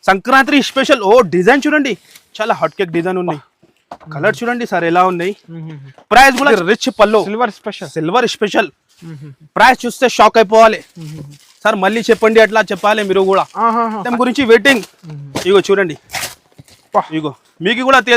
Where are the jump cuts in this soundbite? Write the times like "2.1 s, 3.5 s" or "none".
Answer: 6.5 s, 14.1 s